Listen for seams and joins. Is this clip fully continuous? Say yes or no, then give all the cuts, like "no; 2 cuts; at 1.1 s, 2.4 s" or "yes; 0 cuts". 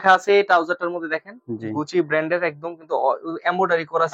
yes; 0 cuts